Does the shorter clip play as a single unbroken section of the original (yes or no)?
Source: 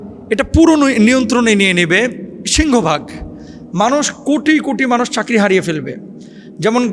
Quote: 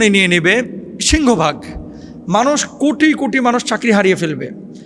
yes